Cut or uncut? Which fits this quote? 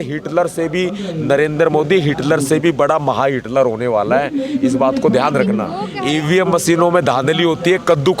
cut